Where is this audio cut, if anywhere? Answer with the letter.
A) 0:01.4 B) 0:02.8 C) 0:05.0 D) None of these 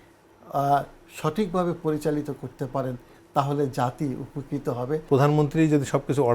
C